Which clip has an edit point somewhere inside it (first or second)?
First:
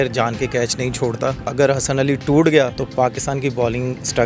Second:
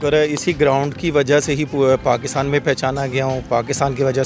first